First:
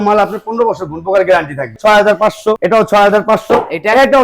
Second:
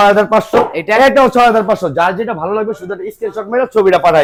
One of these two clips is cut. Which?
first; 1 cut; at 1.8 s

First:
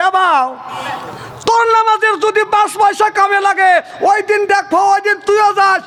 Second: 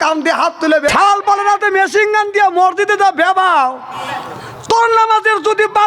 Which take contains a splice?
second; 1 cut; at 0.9 s

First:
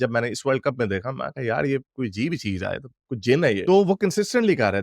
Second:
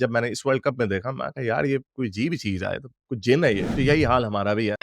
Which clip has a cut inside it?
second; 1 cut; at 3.6 s

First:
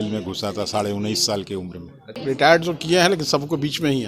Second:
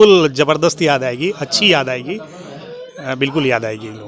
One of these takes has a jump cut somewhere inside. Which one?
first; 1 cut; at 2.2 s

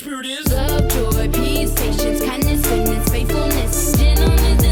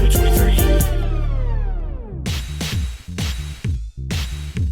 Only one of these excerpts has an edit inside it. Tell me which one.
second; 1 cut; at 2.2 s

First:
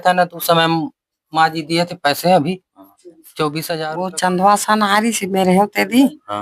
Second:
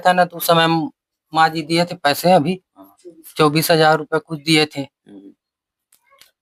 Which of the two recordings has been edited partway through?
first; 1 cut; at 3.9 s

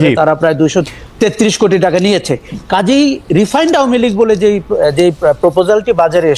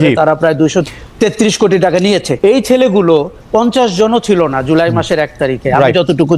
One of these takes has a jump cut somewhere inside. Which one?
second; 1 cut; at 2.3 s

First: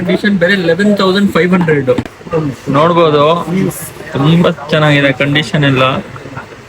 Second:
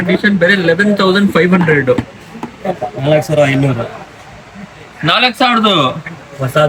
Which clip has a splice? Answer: first; 1 cut; at 2.1 s

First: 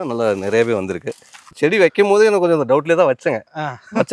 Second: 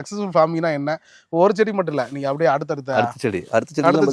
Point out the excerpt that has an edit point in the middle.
first; 1 cut; at 1.5 s

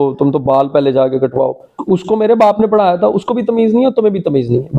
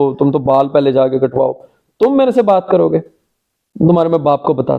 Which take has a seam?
first; 1 cut; at 1.7 s

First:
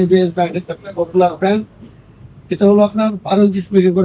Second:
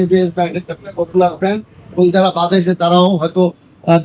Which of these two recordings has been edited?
second; 1 cut; at 1.8 s

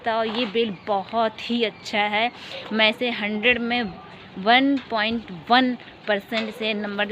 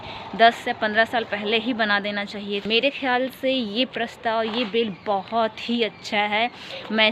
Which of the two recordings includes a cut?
second; 1 cut; at 2.6 s

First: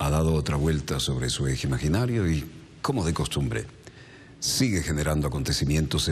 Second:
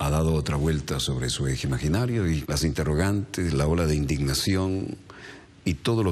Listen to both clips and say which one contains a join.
first; 1 cut; at 2.5 s

